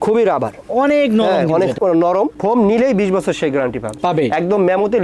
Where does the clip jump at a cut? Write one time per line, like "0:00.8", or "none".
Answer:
0:02.3
0:03.9